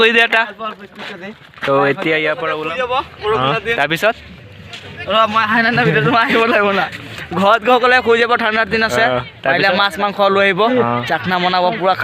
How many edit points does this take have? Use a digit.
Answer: 1